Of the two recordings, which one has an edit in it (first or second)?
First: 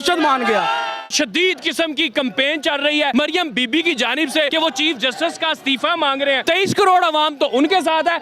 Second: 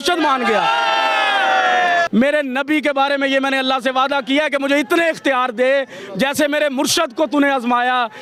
first